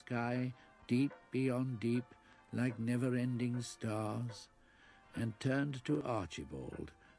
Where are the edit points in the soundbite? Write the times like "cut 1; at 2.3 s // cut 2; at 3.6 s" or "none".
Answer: cut 1; at 3.1 s